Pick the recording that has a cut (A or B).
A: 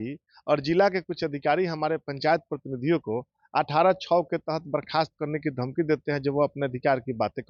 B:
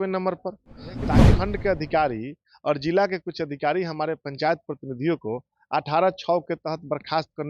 B